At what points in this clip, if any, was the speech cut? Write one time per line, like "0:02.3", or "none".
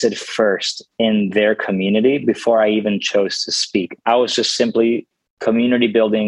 0:04.0